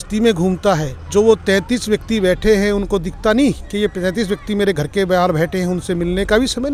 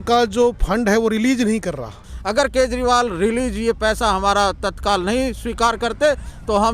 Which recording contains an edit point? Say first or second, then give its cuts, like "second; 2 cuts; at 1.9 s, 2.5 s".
second; 1 cut; at 2.1 s